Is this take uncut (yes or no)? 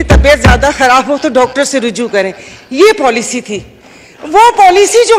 yes